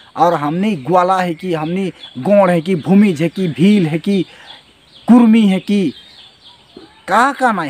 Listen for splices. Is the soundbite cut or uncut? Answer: uncut